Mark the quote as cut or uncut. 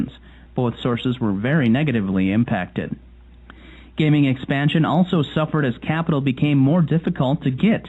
uncut